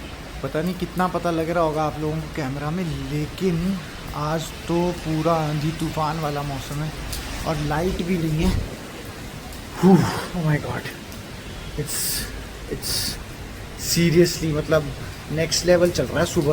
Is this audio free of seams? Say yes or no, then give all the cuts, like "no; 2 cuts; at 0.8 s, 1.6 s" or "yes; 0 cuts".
yes; 0 cuts